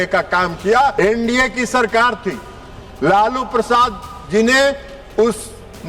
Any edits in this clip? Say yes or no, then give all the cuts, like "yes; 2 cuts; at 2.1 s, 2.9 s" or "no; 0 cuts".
yes; 1 cut; at 0.9 s